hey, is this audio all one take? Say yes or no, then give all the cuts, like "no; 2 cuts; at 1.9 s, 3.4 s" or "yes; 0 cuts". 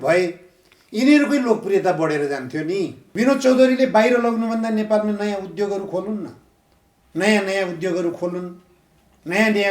no; 1 cut; at 3.0 s